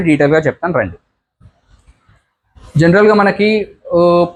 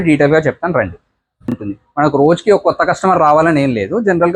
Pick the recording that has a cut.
second; 1 cut; at 1.6 s

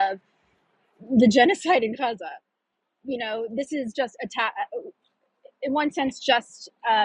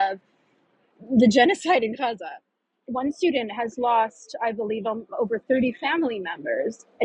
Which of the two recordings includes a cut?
second; 1 cut; at 2.8 s

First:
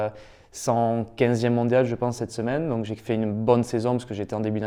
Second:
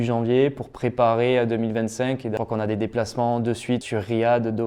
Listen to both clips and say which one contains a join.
second; 2 cuts; at 2.3 s, 3.8 s

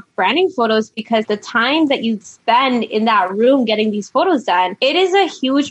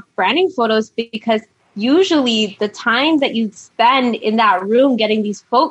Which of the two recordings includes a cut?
first; 2 cuts; at 1.2 s, 4.3 s

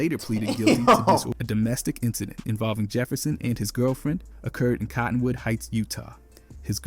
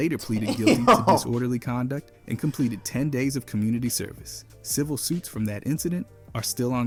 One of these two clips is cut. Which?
first; 1 cut; at 1.3 s

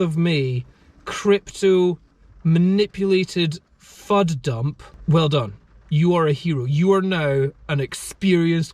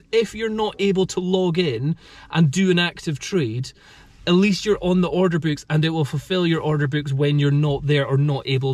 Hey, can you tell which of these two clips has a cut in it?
first; 1 cut; at 4.8 s

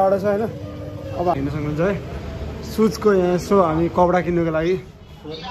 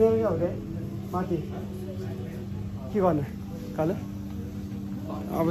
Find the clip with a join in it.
first; 1 cut; at 1.3 s

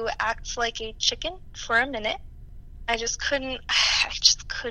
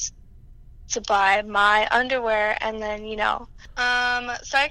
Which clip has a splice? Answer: second; 1 cut; at 3.6 s

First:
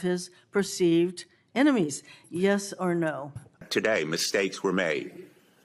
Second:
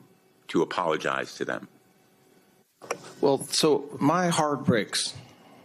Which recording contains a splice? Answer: first; 1 cut; at 3.6 s

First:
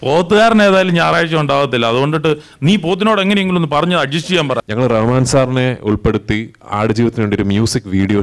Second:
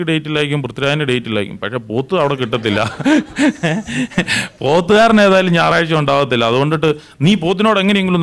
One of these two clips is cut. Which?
first; 1 cut; at 4.6 s

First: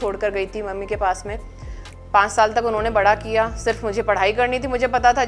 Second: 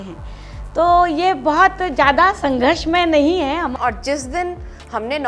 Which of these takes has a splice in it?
second; 1 cut; at 3.7 s

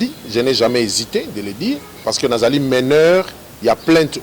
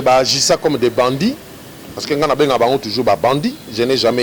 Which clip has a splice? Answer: first; 1 cut; at 2.0 s

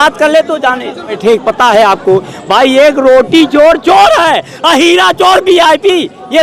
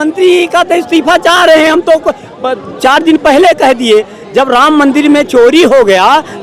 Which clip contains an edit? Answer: first; 1 cut; at 1.2 s

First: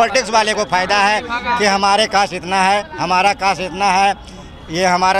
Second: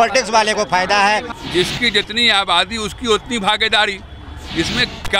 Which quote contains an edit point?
second; 1 cut; at 1.3 s

